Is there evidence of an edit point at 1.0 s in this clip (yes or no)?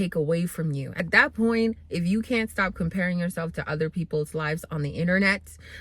yes